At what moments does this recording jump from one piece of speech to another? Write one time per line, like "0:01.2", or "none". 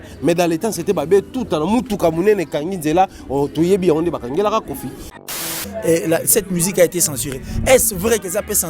0:05.3